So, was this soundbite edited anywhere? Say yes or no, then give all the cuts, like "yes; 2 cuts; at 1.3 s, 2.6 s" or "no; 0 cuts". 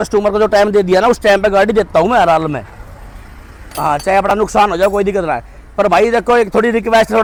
no; 0 cuts